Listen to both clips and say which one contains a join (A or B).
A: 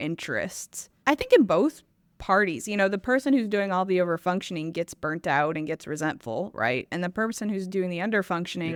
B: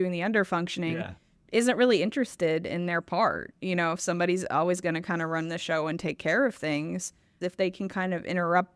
B